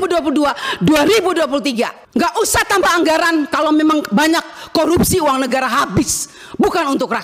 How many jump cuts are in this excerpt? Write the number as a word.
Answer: zero